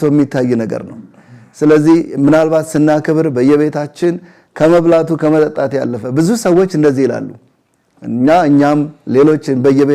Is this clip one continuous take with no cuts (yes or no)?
yes